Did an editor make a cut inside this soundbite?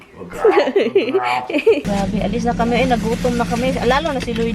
yes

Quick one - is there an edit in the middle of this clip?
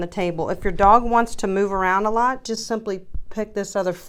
no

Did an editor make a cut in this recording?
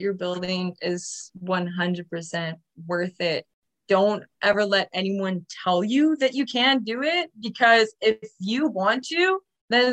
no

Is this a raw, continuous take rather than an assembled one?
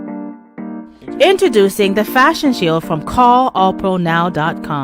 yes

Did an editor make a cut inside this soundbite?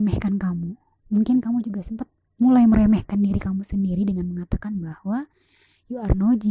no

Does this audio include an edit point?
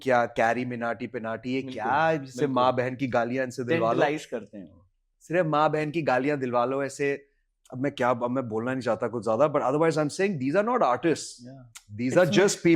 no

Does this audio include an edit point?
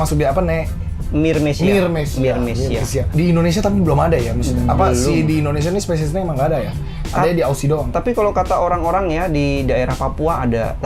no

